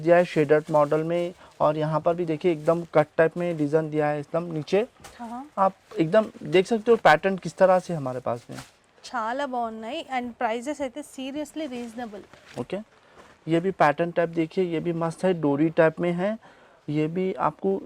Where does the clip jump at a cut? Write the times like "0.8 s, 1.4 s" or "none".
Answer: none